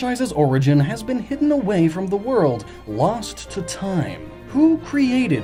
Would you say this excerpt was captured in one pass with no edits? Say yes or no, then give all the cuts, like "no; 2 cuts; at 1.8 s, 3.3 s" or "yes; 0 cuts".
yes; 0 cuts